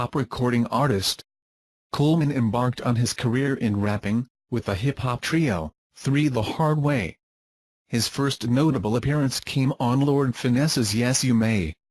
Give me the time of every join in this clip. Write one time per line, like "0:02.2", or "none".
0:02.3